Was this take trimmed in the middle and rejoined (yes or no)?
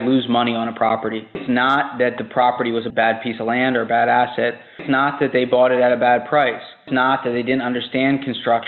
yes